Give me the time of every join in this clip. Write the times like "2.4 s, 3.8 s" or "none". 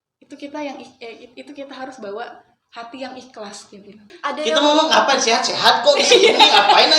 4.1 s